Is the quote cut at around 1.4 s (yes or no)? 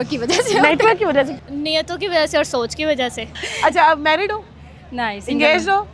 yes